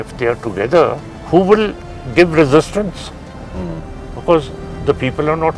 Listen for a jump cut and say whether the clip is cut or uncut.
cut